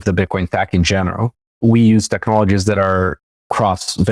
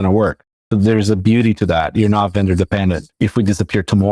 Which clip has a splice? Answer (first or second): second